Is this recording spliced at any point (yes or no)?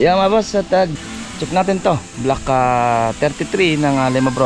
yes